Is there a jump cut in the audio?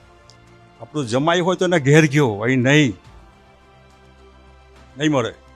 yes; 2 cuts; at 3.0 s, 4.5 s

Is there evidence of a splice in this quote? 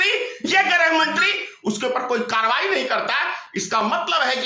no; 0 cuts

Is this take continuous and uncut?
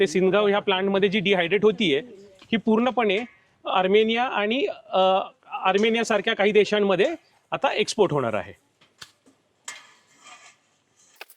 yes; 0 cuts

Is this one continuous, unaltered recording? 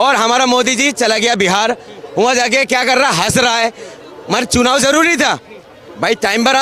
yes; 0 cuts

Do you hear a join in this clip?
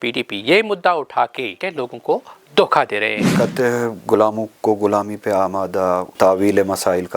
yes; 3 cuts; at 1.6 s, 3.3 s, 6.1 s

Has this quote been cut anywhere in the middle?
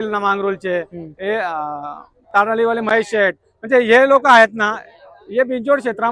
no; 0 cuts

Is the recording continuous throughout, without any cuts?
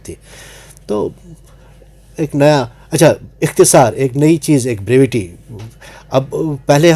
yes; 0 cuts

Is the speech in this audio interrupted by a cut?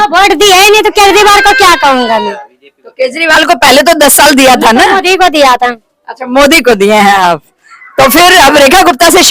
no; 0 cuts

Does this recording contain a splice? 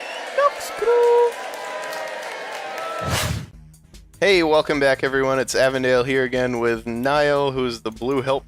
no; 0 cuts

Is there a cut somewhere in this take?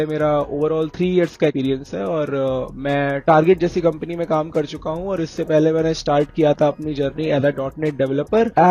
no; 0 cuts

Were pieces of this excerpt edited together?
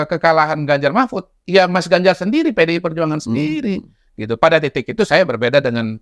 no; 0 cuts

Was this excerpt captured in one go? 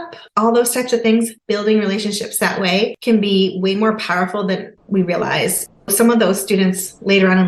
no; 3 cuts; at 1.4 s, 3.0 s, 4.8 s

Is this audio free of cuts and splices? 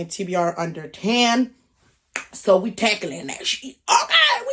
yes; 0 cuts

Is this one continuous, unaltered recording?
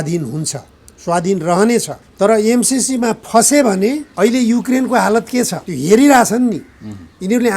no; 3 cuts; at 2.0 s, 4.1 s, 5.6 s

